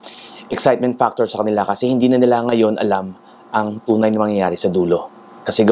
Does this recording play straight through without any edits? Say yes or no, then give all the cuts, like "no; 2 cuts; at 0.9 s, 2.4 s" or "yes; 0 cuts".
yes; 0 cuts